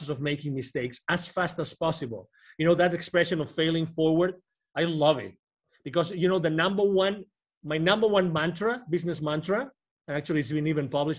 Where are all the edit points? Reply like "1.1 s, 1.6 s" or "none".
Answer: none